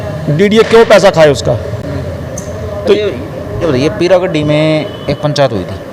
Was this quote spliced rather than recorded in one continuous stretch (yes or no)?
no